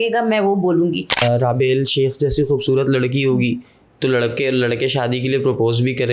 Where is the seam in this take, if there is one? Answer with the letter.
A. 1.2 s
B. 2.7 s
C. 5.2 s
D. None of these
A